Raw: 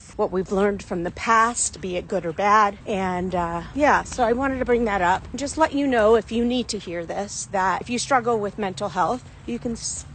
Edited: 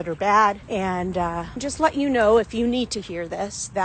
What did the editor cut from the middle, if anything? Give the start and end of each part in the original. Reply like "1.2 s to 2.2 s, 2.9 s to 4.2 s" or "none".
3.7 s to 5.3 s